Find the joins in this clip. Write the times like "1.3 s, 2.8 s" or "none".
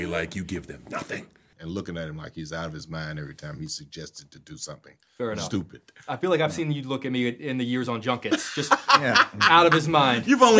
1.5 s